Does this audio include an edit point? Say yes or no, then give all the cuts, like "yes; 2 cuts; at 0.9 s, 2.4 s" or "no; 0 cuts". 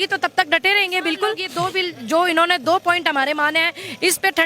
yes; 1 cut; at 1.5 s